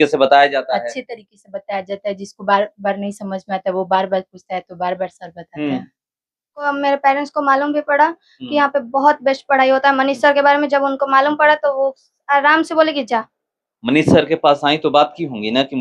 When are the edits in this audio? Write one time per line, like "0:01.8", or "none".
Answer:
0:06.7